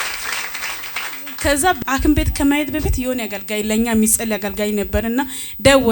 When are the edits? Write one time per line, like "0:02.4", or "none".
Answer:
0:01.8